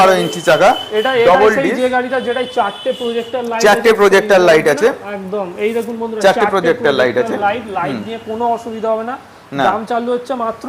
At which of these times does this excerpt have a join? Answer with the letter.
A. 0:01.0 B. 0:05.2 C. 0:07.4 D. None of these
D